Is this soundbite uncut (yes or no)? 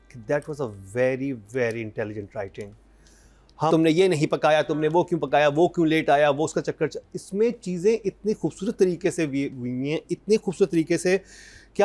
no